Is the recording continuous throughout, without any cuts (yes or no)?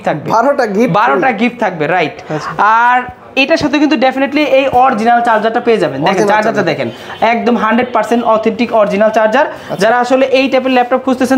yes